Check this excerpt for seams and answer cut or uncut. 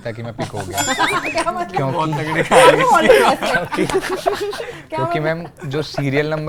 uncut